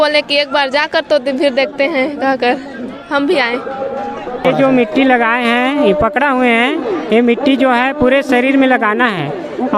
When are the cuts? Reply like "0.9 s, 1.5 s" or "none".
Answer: 4.4 s